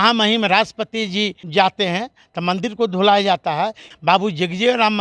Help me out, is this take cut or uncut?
cut